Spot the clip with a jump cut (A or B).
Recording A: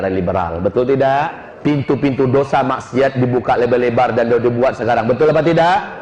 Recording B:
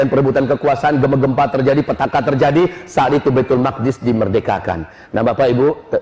A